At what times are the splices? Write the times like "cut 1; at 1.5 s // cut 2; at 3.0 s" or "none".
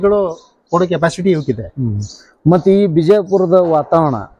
none

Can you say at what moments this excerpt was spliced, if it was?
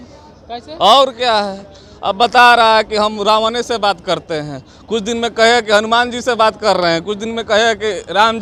none

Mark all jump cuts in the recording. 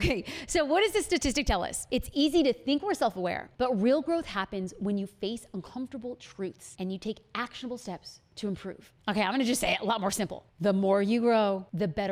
none

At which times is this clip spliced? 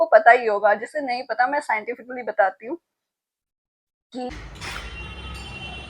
cut 1; at 4.3 s

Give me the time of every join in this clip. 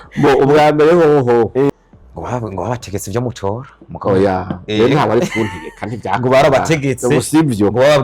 cut 1; at 1.7 s

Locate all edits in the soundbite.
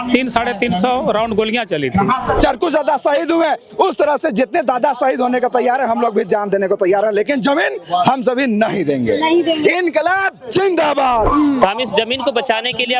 cut 1; at 2.4 s // cut 2; at 11.3 s

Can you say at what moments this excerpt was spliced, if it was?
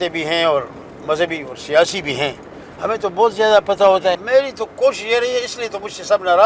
cut 1; at 4.2 s

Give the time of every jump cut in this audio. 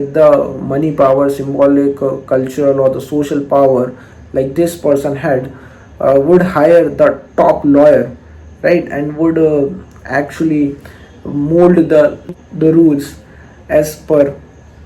cut 1; at 12.3 s

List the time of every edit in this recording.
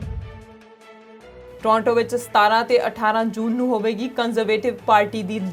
cut 1; at 1.5 s

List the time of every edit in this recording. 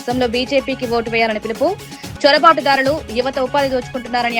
none

